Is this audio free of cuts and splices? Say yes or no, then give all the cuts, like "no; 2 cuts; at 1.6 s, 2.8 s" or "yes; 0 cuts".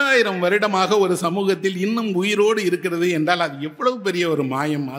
yes; 0 cuts